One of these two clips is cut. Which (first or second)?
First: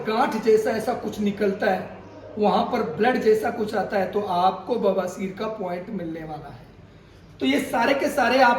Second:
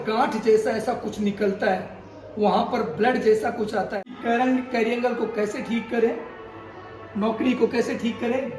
second